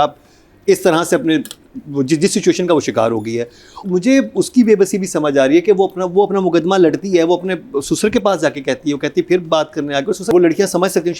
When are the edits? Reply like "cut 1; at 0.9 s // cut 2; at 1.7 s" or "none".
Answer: cut 1; at 3.8 s // cut 2; at 10.3 s